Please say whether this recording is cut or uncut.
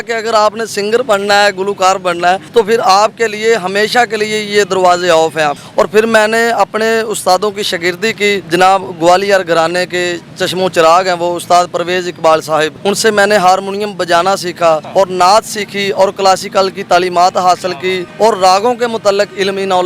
cut